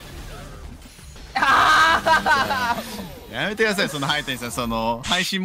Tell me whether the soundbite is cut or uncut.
cut